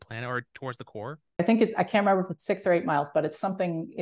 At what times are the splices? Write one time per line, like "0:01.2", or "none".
0:01.4

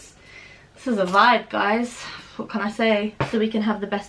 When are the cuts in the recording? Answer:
0:03.1

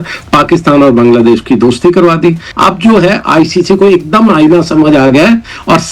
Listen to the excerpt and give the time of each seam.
0:02.5

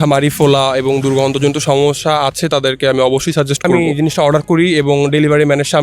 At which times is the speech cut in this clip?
0:03.6

